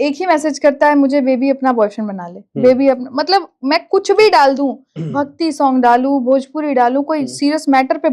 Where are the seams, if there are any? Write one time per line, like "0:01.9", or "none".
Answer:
none